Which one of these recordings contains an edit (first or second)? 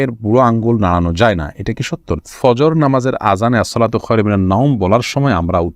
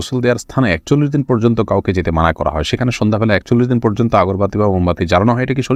first